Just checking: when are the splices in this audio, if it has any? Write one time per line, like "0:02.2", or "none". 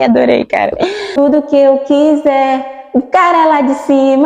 0:01.2